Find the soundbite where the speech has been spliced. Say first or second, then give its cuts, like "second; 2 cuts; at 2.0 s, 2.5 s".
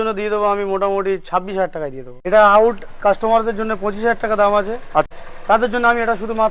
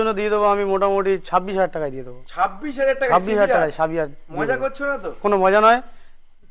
first; 2 cuts; at 2.1 s, 5.1 s